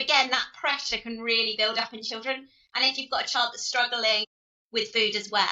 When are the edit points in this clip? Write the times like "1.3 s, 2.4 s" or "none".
none